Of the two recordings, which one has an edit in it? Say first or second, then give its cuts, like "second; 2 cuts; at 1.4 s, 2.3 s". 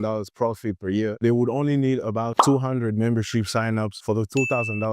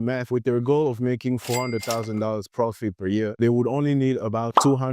first; 1 cut; at 3.9 s